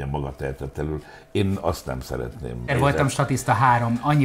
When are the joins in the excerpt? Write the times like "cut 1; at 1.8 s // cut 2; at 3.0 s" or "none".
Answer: cut 1; at 2.7 s